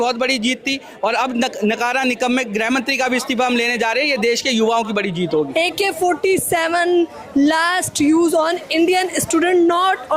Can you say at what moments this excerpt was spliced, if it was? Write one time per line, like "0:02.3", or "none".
0:05.5